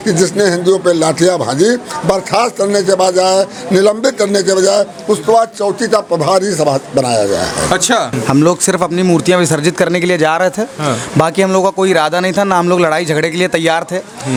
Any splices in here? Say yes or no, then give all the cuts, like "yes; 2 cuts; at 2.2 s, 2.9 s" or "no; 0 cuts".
no; 0 cuts